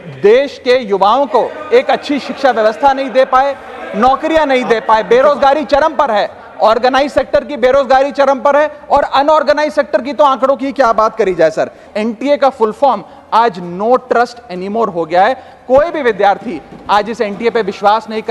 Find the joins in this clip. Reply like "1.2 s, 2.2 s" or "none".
11.9 s